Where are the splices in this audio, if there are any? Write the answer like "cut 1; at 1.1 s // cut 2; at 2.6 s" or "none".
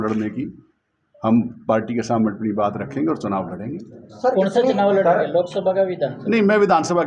none